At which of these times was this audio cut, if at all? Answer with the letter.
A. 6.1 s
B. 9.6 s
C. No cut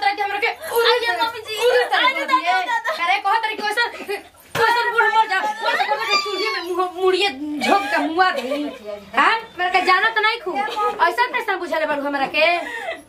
B